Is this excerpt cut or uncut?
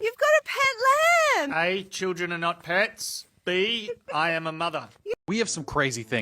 cut